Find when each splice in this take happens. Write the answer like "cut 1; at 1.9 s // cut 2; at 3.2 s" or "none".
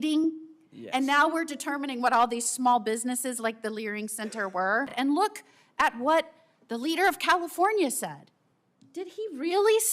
cut 1; at 4.9 s